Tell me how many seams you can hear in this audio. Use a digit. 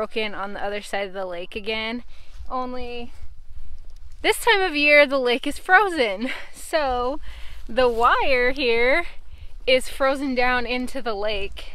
0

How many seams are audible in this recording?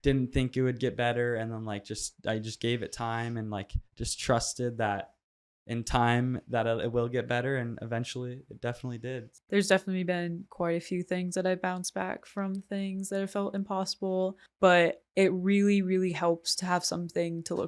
3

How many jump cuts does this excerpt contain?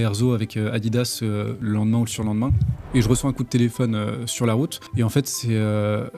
3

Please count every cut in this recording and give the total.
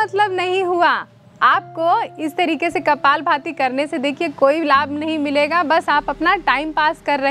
0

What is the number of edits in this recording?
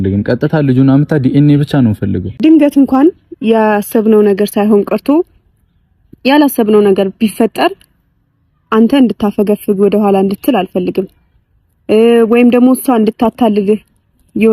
1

